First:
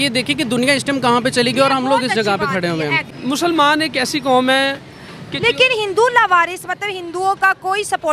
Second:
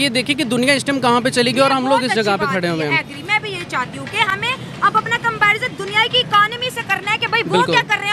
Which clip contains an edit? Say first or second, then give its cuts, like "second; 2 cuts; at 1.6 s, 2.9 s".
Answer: first; 1 cut; at 3.1 s